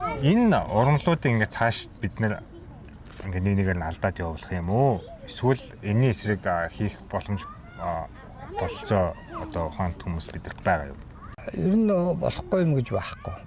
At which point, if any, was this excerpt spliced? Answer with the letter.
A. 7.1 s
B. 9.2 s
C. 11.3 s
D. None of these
C